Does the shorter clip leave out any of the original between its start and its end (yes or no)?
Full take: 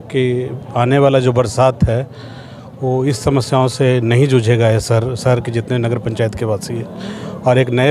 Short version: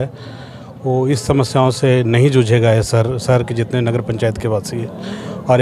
no